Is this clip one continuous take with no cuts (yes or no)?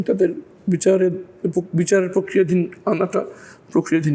yes